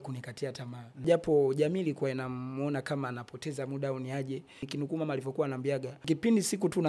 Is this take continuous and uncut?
no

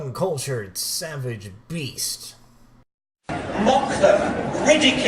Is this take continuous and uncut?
no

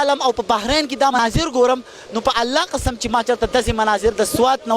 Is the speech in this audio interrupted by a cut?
yes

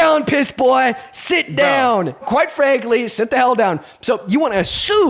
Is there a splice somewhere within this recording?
yes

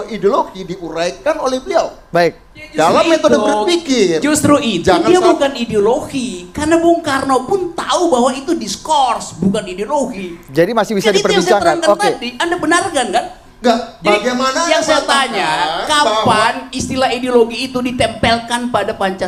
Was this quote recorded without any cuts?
yes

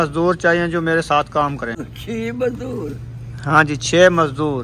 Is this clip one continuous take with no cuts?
no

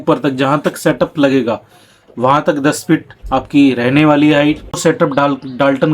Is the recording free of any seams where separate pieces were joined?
no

